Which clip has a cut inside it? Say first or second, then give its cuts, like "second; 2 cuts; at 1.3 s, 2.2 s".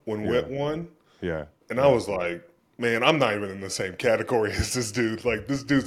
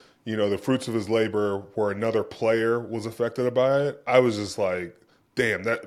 first; 1 cut; at 1.6 s